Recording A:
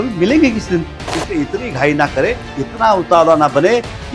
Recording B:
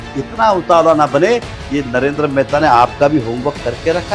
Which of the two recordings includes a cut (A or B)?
A